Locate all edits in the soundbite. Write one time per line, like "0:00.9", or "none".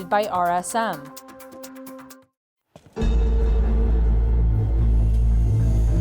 0:01.0
0:02.1